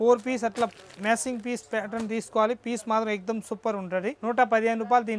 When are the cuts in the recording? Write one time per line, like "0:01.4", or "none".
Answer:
0:04.2